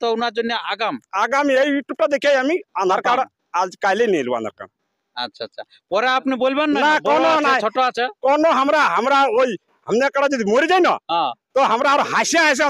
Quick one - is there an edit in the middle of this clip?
no; 0 cuts

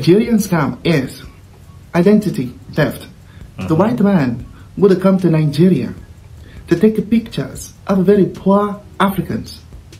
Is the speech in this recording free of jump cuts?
yes; 0 cuts

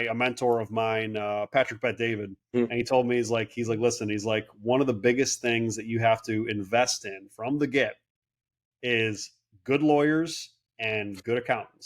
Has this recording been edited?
yes; 1 cut; at 2.5 s

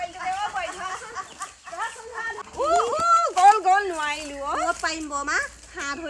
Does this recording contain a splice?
yes; 1 cut; at 2.4 s

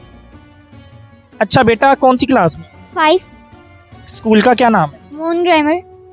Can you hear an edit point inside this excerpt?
no; 0 cuts

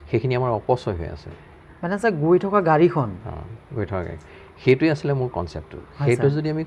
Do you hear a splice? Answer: no; 0 cuts

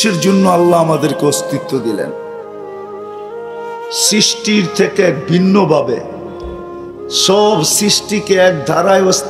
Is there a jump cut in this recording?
no; 0 cuts

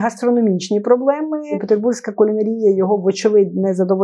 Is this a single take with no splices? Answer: no; 1 cut; at 1.6 s

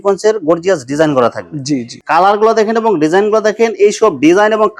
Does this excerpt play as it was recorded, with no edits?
no; 1 cut; at 1.9 s

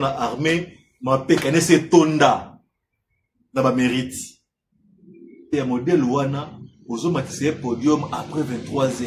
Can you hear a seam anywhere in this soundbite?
yes; 1 cut; at 5.5 s

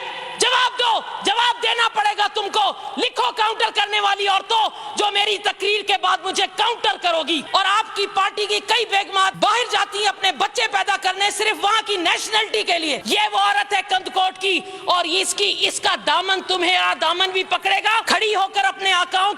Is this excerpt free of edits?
no; 4 cuts; at 7.4 s, 9.3 s, 13.0 s, 18.0 s

